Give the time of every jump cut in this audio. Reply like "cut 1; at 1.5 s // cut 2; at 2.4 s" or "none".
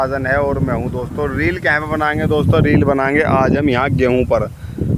none